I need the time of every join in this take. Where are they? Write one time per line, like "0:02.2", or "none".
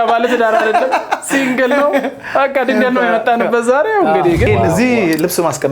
0:04.5